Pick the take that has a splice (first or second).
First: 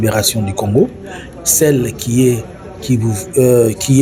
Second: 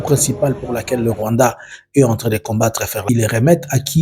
second